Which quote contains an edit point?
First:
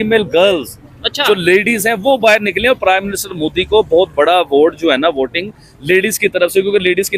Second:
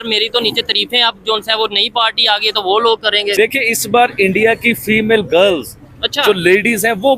second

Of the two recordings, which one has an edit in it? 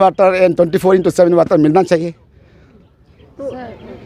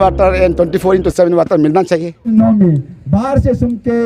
second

